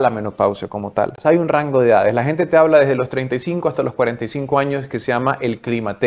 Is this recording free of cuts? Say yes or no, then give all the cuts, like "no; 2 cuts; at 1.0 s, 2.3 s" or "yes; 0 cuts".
no; 1 cut; at 1.2 s